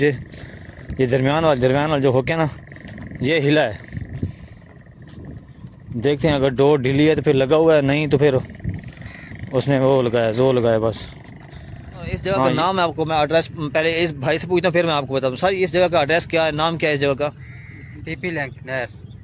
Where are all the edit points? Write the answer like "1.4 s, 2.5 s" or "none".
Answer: 12.5 s